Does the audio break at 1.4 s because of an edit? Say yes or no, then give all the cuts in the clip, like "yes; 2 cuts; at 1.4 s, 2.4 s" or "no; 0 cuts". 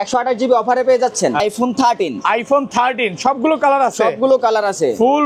yes; 1 cut; at 1.4 s